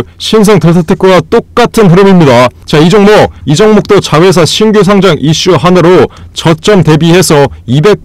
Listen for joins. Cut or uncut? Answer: cut